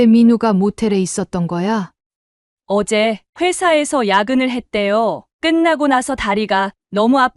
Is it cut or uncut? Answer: cut